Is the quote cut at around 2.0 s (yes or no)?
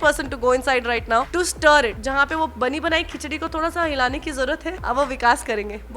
yes